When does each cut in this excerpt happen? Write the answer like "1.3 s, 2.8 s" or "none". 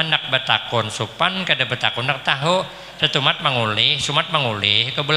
none